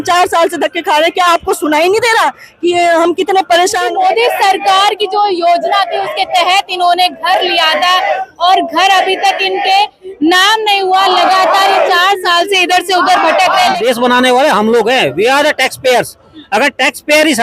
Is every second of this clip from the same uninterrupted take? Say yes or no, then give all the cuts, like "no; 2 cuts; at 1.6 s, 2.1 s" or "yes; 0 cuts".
no; 2 cuts; at 3.9 s, 13.8 s